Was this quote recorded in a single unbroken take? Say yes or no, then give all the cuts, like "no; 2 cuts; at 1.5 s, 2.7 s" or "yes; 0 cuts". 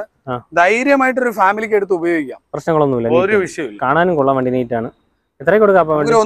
yes; 0 cuts